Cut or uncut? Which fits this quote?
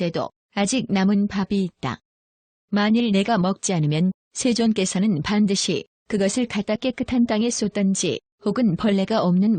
uncut